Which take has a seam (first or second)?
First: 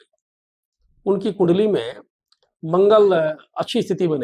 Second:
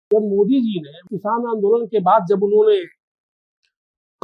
second